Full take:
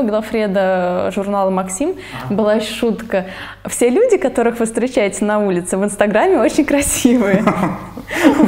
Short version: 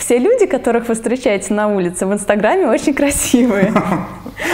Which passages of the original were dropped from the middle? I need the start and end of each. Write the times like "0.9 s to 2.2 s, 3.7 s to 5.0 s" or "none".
none